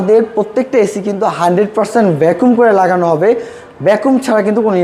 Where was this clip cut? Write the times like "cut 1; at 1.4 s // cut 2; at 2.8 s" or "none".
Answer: none